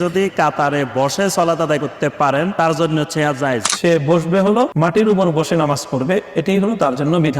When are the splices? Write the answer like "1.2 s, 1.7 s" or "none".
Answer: 2.5 s, 3.7 s, 4.7 s